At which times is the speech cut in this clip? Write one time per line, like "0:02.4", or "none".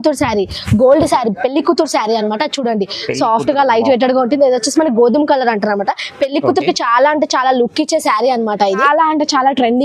0:08.8

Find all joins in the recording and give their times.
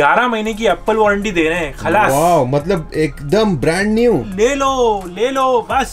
0:04.3

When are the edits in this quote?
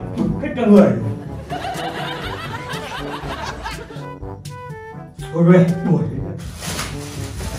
none

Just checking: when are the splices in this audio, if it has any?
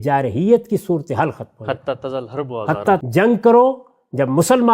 0:03.0

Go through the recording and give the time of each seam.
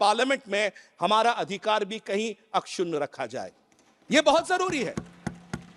none

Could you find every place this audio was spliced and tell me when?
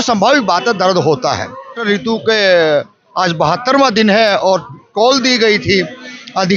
0:01.8

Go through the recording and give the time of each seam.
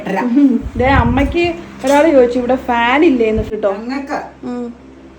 0:03.5

